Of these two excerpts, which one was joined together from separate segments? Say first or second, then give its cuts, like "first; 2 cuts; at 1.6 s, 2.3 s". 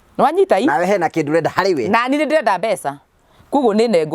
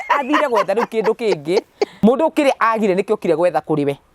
second; 1 cut; at 1.9 s